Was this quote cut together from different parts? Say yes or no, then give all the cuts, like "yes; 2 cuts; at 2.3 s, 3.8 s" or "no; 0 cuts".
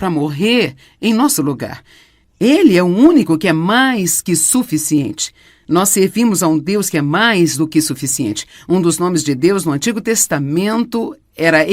yes; 1 cut; at 6.4 s